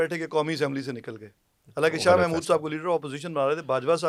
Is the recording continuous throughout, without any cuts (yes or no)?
yes